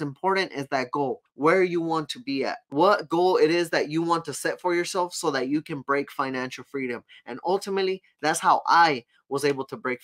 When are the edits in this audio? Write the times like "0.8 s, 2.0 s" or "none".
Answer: 1.3 s, 2.6 s

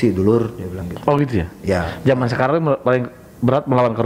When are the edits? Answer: none

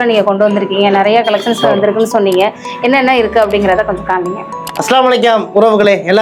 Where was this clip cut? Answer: none

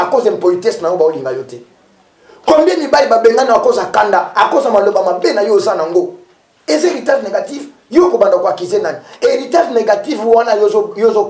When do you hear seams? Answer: 9.1 s

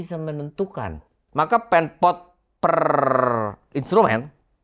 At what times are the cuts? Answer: 1.1 s

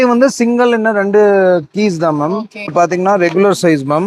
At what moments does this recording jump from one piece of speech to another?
2.7 s

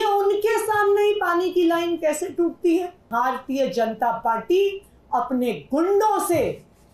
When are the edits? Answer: 3.0 s

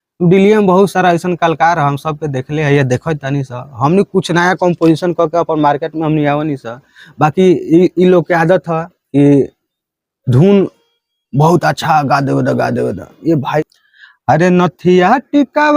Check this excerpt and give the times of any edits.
13.6 s

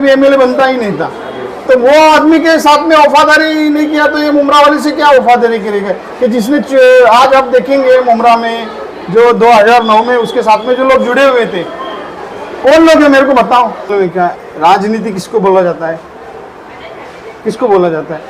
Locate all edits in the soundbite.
13.9 s

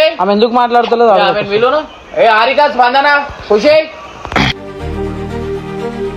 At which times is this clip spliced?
none

